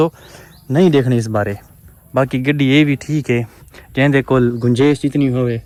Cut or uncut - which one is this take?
uncut